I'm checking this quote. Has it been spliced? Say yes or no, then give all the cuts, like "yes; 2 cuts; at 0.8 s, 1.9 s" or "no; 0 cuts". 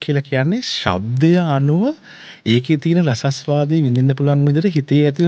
no; 0 cuts